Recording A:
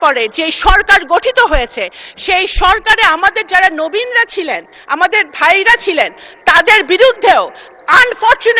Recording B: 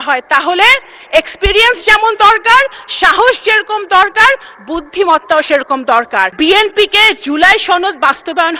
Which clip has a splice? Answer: B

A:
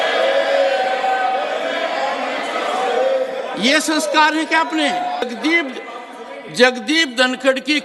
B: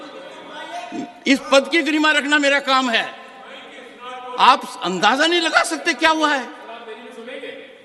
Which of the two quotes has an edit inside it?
A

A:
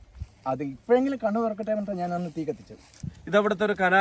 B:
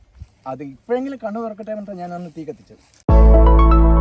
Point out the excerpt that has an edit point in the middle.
A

